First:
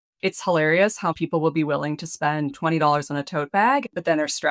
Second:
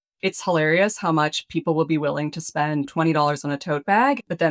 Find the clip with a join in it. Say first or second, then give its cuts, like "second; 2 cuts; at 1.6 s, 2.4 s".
first; 1 cut; at 1.1 s